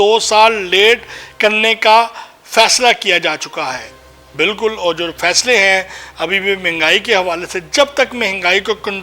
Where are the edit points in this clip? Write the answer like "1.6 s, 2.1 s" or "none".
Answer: none